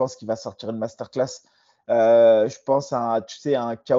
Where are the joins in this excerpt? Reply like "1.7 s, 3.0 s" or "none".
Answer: none